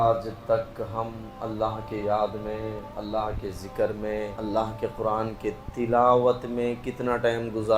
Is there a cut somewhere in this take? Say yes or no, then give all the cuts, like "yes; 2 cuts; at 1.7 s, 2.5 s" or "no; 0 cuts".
yes; 2 cuts; at 2.9 s, 4.3 s